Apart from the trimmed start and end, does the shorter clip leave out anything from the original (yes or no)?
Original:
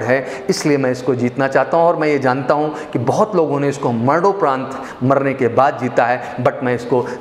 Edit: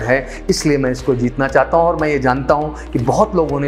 no